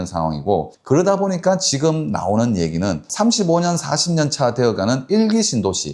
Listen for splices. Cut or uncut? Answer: cut